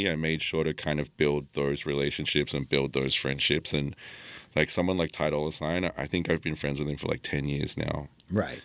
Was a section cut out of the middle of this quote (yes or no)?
no